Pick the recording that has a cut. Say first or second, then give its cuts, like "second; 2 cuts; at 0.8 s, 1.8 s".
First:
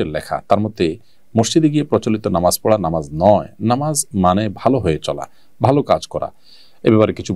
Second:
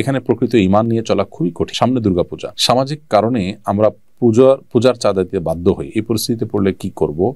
second; 2 cuts; at 1.7 s, 2.5 s